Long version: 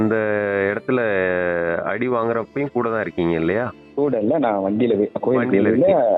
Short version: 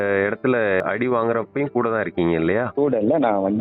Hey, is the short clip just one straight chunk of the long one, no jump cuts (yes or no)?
no